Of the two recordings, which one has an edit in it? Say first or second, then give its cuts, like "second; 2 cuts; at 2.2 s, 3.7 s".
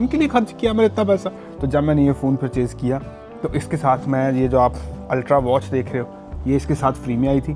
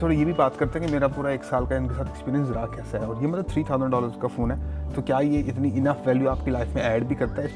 first; 1 cut; at 1.3 s